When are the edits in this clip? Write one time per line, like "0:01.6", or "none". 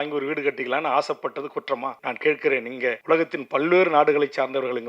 0:02.0
0:03.0